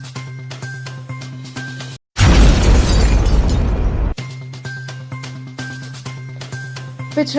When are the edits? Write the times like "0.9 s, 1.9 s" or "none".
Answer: 2.0 s, 5.7 s